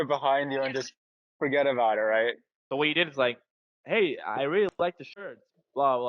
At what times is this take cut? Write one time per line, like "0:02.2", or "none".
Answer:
0:02.5